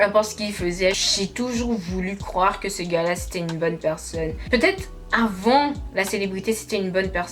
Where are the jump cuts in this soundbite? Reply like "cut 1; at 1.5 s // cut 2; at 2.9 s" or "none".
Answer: cut 1; at 1.0 s // cut 2; at 4.4 s